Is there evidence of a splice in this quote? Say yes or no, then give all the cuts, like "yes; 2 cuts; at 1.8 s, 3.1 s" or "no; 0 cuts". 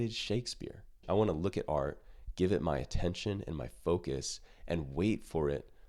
yes; 1 cut; at 0.9 s